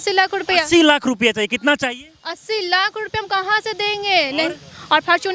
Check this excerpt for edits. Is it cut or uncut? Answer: uncut